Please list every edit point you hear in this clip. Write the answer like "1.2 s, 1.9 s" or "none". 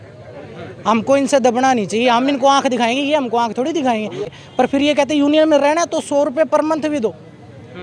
4.3 s